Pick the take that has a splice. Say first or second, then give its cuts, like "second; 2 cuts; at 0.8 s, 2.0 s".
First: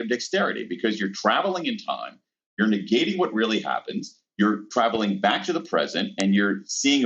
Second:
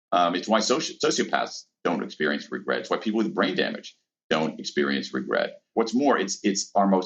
second; 1 cut; at 5.7 s